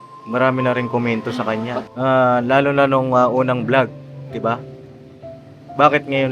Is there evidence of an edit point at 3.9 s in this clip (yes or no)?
no